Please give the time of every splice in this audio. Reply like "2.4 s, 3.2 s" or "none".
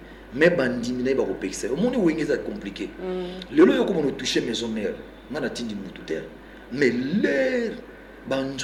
none